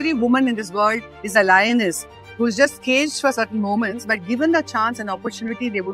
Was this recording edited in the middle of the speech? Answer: no; 0 cuts

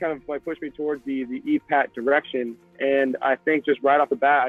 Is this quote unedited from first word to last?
yes; 0 cuts

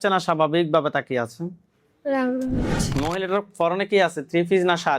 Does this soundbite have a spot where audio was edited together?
yes; 1 cut; at 2.8 s

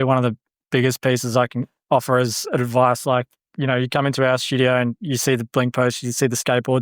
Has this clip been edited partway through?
no; 0 cuts

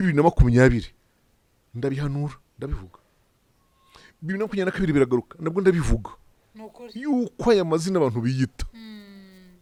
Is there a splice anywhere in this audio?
no; 0 cuts

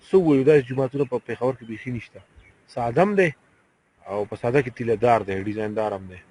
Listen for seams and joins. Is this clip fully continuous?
yes; 0 cuts

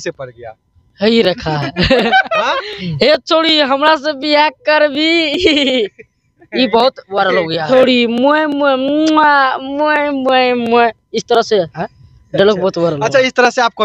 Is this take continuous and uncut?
no; 2 cuts; at 2.8 s, 7.6 s

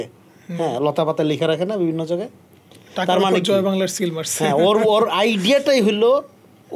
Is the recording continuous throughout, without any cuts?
yes; 0 cuts

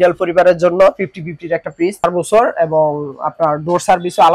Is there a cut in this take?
yes; 1 cut; at 2.0 s

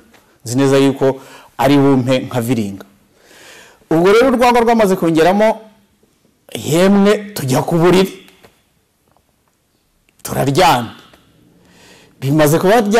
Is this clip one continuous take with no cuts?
yes; 0 cuts

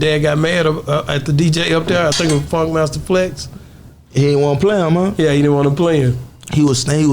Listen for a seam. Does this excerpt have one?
yes; 1 cut; at 3.6 s

